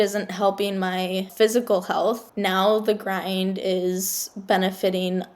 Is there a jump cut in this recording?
yes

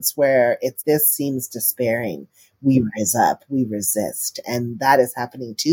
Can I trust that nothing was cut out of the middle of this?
yes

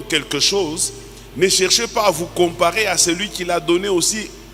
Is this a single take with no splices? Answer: yes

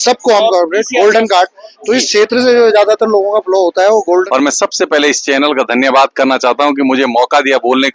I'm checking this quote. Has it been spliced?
yes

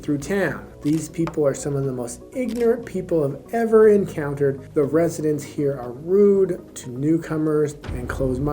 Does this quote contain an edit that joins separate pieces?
yes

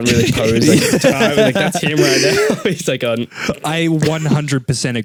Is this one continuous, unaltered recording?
yes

